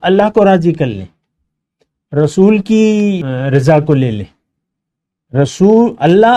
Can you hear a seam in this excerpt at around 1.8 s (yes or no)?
no